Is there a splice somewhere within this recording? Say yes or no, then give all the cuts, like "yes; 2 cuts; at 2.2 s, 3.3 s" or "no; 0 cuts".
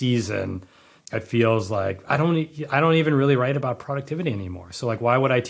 yes; 1 cut; at 0.9 s